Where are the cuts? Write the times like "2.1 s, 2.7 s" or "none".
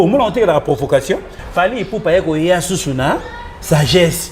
1.4 s